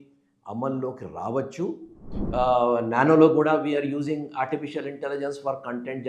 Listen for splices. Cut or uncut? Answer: cut